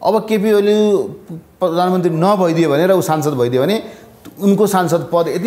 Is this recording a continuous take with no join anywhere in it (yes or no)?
yes